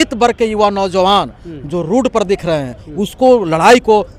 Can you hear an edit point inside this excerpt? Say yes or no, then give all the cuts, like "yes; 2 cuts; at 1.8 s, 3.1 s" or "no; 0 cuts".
no; 0 cuts